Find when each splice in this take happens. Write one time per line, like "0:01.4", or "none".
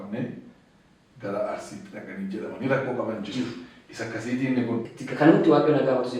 0:04.8